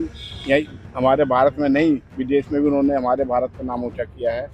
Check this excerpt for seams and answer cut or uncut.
uncut